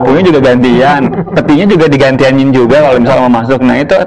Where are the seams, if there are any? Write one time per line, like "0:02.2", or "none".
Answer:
none